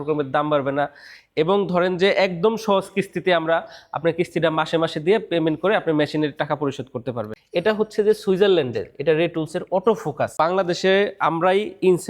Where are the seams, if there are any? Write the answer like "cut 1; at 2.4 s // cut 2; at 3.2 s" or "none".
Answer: cut 1; at 7.3 s // cut 2; at 10.3 s

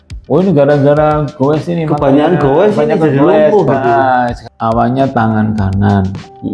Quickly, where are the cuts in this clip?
cut 1; at 4.4 s

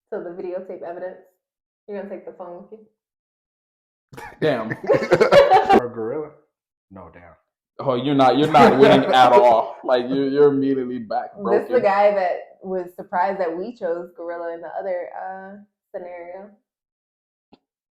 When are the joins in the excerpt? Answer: cut 1; at 5.8 s

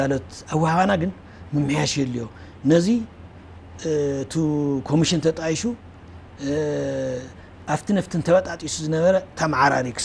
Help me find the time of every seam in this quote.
none

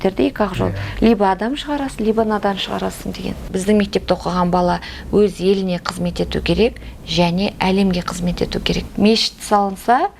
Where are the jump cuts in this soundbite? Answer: cut 1; at 3.5 s // cut 2; at 8.8 s

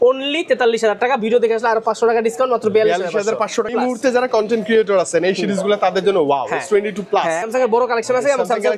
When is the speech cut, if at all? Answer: cut 1; at 3.7 s // cut 2; at 7.4 s

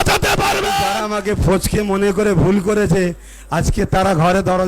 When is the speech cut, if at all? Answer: cut 1; at 1.0 s

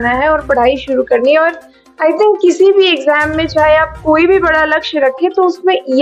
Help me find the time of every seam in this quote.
none

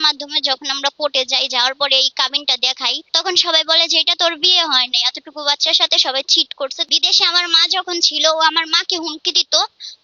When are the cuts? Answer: cut 1; at 3.0 s // cut 2; at 6.8 s

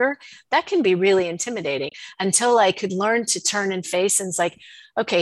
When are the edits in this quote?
cut 1; at 1.9 s

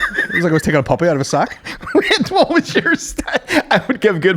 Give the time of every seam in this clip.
none

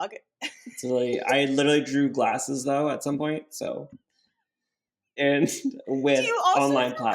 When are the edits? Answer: cut 1; at 5.1 s

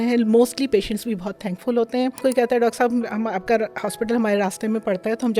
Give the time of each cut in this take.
cut 1; at 2.2 s

